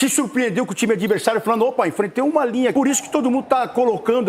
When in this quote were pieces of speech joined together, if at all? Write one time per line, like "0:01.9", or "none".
0:02.7

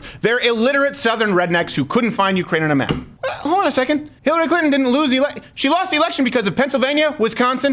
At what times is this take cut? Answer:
0:03.4
0:04.1

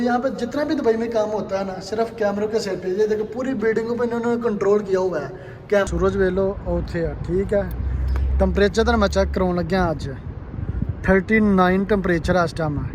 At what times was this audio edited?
0:05.9

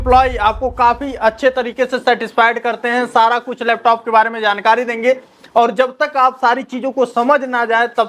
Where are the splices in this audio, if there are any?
none

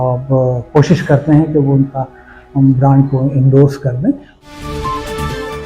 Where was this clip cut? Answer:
0:04.3

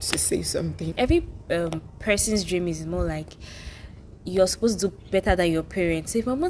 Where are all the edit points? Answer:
0:00.9

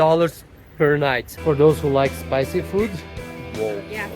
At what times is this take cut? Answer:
0:01.3

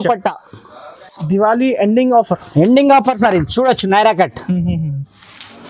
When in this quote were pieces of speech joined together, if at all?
0:01.1

